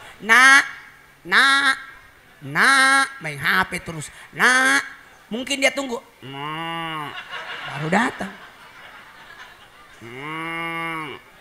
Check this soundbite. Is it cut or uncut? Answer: cut